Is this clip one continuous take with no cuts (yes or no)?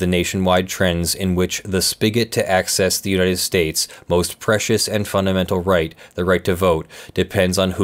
yes